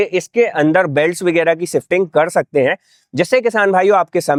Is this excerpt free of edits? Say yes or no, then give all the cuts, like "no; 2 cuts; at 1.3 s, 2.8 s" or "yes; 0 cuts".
yes; 0 cuts